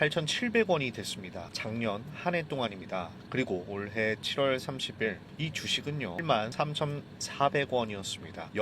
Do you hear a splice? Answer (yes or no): yes